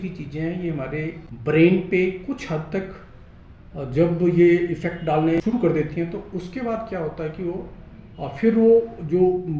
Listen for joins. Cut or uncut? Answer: cut